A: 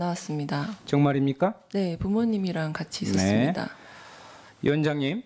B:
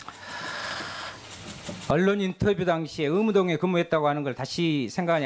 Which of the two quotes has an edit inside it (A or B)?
B